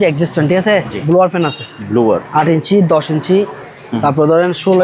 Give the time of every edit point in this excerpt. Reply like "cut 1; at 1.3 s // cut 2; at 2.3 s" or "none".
cut 1; at 1.0 s